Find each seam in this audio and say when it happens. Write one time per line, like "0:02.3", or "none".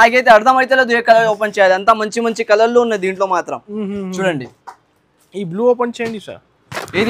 none